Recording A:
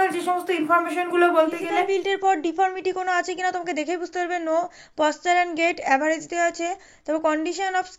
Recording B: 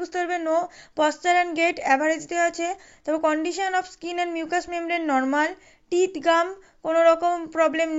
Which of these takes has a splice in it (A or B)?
A